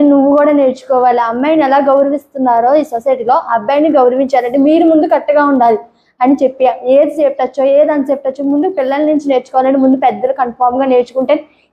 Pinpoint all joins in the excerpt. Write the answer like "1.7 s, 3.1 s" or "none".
none